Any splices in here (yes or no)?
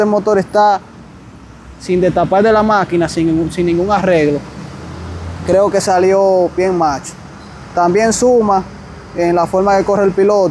no